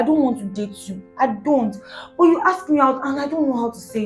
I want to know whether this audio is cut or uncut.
uncut